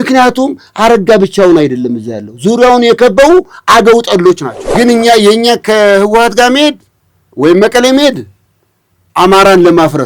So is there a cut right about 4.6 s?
yes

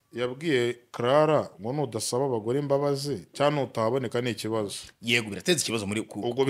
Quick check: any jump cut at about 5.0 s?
no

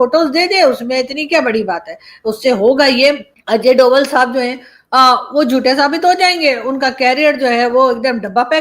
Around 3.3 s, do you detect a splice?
yes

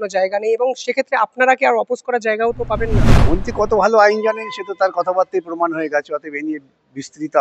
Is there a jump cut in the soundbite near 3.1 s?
yes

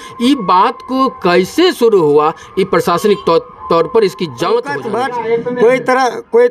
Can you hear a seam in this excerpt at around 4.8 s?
yes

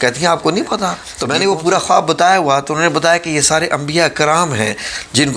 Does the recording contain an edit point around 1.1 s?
yes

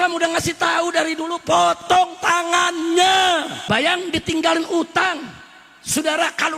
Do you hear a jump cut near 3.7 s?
yes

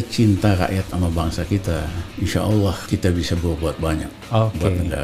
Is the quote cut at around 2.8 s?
yes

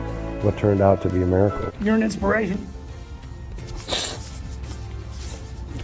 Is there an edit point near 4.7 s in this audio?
no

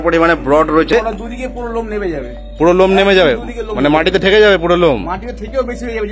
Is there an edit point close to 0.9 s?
yes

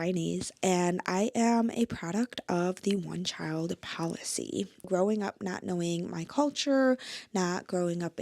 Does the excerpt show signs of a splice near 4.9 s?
yes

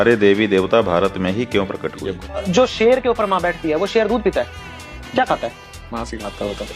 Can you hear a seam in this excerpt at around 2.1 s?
yes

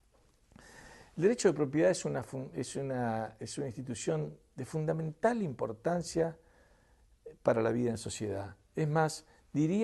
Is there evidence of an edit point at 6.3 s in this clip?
yes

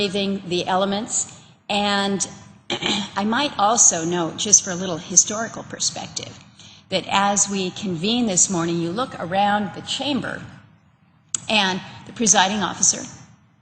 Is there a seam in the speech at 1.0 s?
yes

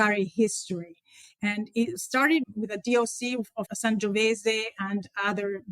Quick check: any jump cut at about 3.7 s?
yes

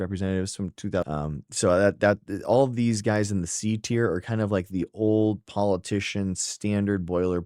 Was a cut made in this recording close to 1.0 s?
yes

